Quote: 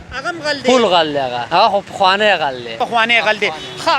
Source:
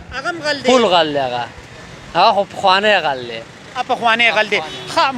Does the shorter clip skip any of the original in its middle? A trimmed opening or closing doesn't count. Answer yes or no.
yes